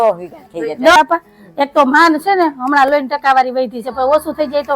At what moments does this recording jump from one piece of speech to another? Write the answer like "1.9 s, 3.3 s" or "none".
0.9 s